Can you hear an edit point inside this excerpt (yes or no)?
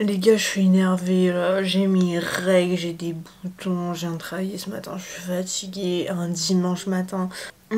no